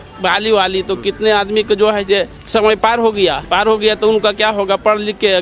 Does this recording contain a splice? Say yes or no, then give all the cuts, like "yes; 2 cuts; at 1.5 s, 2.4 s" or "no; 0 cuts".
yes; 2 cuts; at 2.4 s, 3.4 s